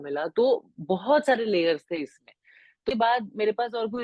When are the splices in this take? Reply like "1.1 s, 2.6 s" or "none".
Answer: 2.9 s

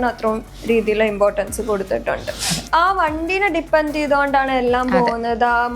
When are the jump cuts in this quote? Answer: 2.6 s

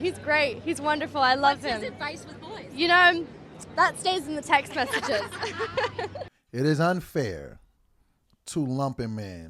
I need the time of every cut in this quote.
6.3 s

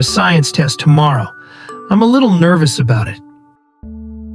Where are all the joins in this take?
3.1 s

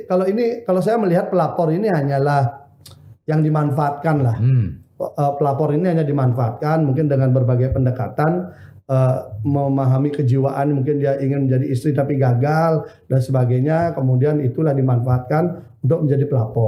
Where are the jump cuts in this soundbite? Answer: none

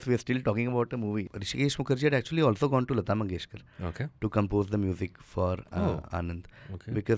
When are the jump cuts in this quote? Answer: 1.3 s

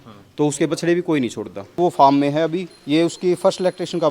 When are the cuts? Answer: 1.8 s

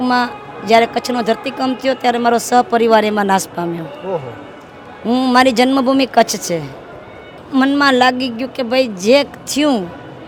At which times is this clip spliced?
none

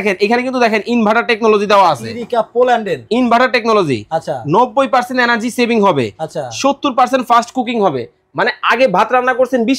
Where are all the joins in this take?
none

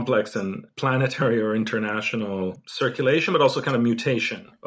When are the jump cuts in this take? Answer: none

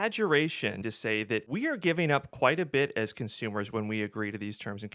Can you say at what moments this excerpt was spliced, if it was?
0.9 s

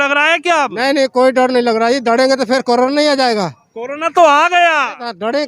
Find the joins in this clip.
none

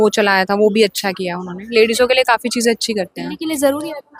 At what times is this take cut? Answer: none

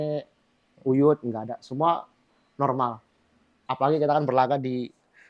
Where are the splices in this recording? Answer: 3.6 s

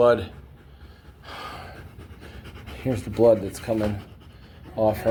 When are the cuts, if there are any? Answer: none

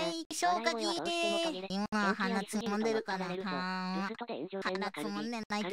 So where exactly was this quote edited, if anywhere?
1.7 s, 4.6 s

